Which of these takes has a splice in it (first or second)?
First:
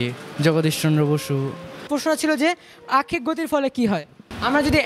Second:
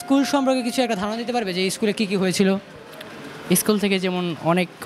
first